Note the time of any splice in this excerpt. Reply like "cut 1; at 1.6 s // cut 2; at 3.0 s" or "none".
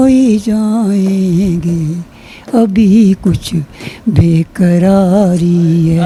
none